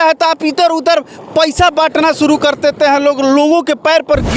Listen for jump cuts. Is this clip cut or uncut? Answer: uncut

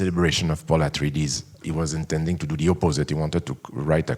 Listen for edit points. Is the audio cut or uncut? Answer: cut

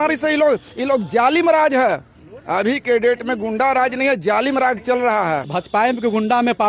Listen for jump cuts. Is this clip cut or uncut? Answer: cut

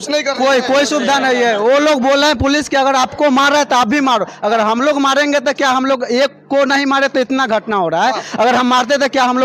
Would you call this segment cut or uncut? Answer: uncut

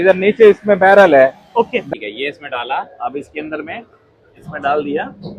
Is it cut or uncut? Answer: cut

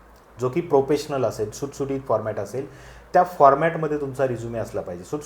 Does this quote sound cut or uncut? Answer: uncut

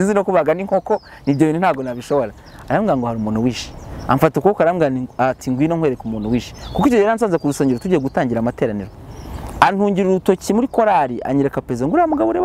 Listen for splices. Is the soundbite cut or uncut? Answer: uncut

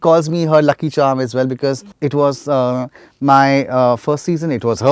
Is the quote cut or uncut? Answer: cut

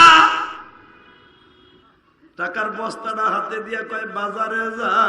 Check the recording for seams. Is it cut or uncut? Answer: cut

